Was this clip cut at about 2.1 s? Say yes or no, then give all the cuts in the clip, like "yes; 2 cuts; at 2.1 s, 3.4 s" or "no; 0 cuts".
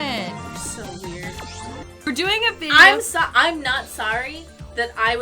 yes; 1 cut; at 2.1 s